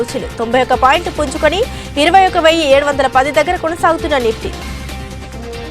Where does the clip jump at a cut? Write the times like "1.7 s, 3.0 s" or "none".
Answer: none